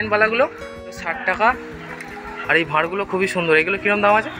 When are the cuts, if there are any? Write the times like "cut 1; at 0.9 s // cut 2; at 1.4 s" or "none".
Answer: cut 1; at 1.1 s